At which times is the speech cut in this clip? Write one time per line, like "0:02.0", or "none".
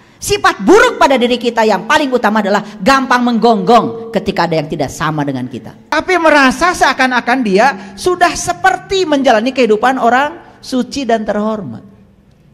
0:05.9